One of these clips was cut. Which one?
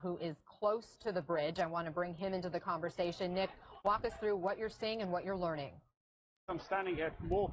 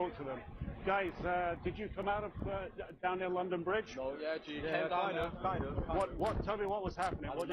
second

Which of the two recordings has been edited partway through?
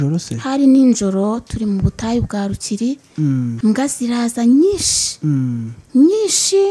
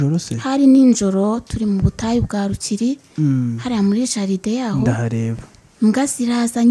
first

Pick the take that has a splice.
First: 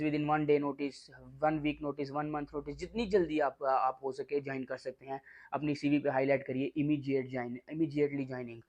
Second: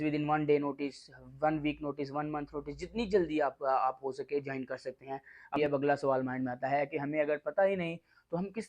second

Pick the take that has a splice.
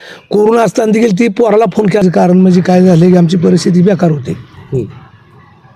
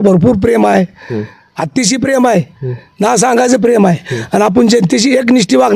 first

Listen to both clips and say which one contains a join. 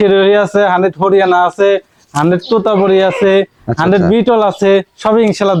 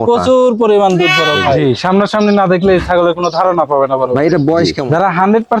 second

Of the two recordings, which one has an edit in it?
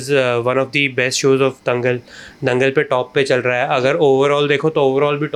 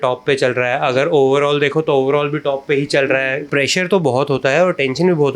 second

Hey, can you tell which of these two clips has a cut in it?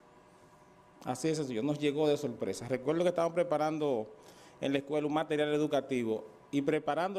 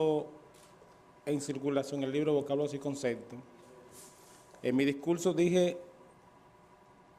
second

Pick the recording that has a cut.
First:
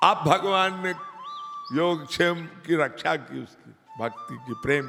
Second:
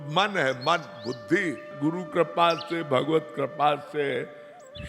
second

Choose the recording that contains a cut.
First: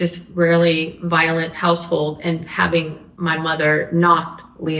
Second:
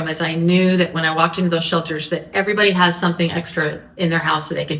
first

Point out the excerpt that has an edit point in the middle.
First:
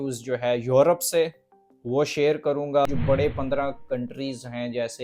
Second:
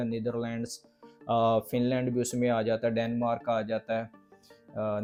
first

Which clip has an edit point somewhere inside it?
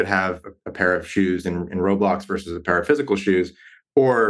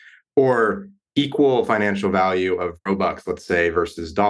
second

